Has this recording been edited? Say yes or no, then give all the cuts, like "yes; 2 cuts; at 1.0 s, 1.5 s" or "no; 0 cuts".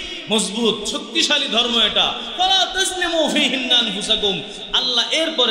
no; 0 cuts